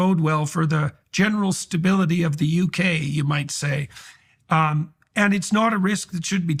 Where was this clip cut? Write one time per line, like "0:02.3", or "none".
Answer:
none

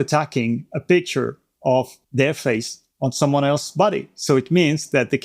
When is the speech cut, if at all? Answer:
0:02.0
0:02.8

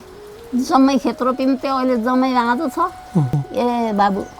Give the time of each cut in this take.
0:03.4

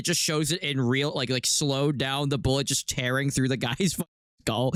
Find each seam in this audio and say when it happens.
none

